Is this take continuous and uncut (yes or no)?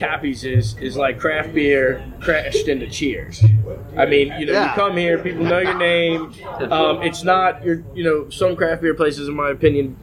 yes